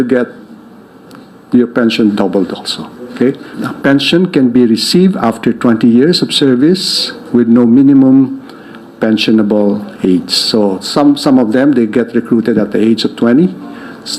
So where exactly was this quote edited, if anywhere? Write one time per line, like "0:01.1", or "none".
0:03.6